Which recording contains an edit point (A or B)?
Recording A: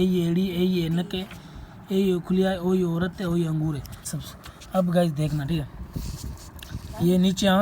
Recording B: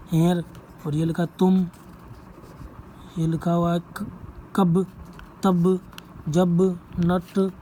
A